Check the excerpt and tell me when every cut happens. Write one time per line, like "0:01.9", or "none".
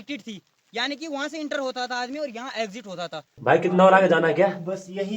0:03.3